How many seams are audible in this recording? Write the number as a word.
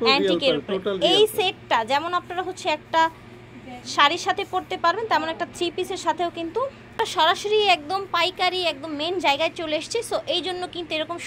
one